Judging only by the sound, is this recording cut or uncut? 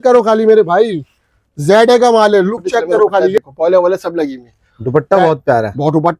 cut